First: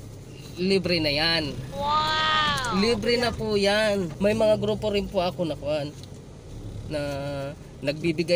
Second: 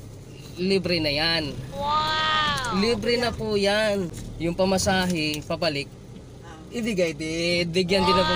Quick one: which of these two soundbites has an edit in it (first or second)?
second